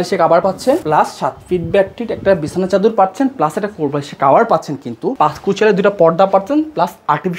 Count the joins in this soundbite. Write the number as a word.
two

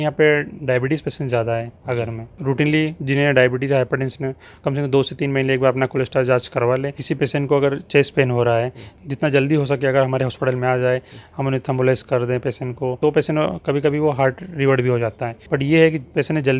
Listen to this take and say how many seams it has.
five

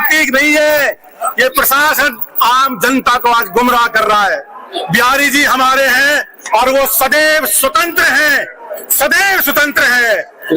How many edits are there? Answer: one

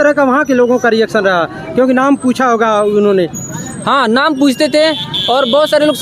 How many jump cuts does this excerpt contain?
zero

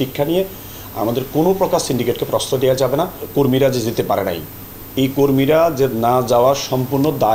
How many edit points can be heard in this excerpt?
one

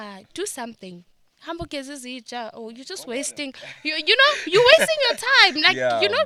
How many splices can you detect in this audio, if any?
zero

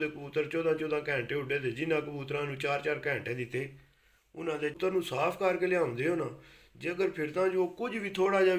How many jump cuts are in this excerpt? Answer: one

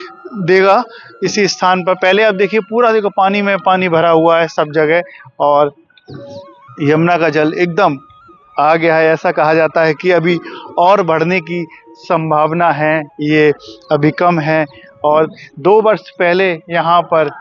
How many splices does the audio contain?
zero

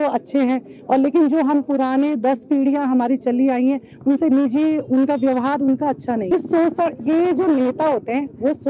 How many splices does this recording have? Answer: one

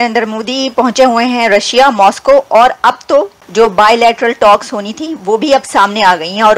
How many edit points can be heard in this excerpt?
one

